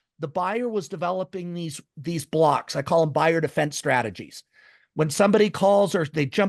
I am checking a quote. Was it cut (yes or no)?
no